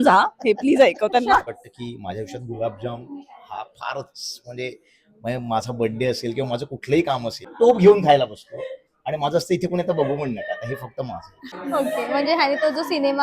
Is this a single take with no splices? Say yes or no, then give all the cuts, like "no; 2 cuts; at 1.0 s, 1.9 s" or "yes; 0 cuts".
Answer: no; 3 cuts; at 1.4 s, 7.5 s, 11.5 s